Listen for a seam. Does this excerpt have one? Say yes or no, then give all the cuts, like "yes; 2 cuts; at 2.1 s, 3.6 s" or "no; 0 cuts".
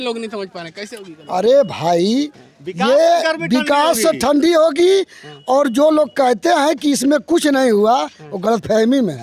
no; 0 cuts